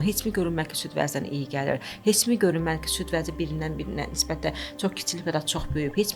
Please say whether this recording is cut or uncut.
uncut